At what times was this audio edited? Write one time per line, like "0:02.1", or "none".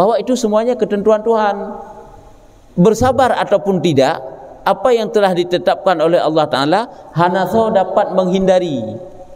none